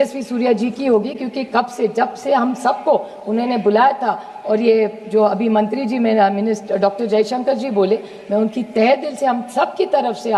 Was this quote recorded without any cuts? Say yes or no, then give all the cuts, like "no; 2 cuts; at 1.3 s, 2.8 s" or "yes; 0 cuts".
yes; 0 cuts